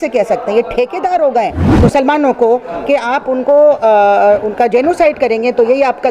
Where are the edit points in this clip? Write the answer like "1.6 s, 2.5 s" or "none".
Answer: 1.6 s